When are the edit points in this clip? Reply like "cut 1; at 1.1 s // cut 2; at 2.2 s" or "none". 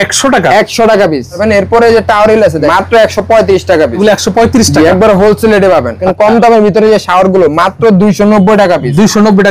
cut 1; at 1.4 s // cut 2; at 2.7 s // cut 3; at 4.0 s // cut 4; at 6.1 s